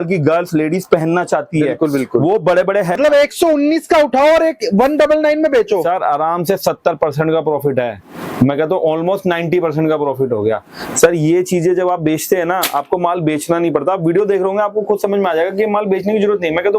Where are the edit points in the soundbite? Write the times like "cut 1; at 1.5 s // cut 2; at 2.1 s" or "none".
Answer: cut 1; at 3.0 s